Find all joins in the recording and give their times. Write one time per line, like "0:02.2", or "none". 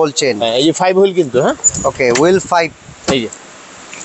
none

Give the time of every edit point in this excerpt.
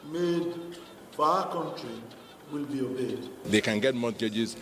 0:03.4

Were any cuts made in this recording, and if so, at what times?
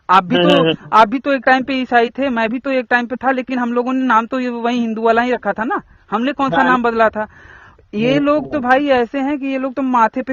none

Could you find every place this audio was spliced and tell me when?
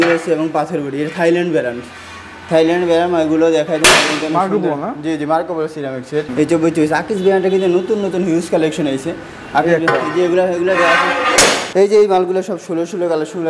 0:06.3
0:11.6

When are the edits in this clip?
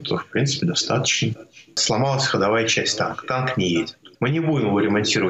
0:01.8
0:04.0

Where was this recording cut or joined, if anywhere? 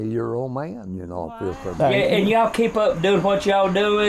0:01.6

